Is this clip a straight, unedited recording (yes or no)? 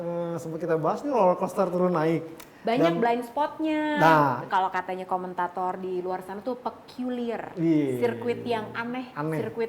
no